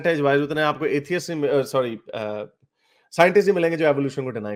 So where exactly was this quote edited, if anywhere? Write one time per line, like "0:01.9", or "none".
none